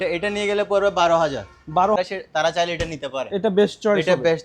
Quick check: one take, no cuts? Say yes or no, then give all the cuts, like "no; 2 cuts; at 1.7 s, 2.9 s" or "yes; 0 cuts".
no; 1 cut; at 2.0 s